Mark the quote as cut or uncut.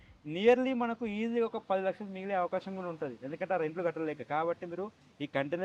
uncut